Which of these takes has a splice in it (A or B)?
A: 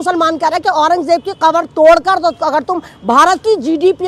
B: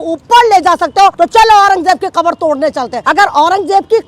B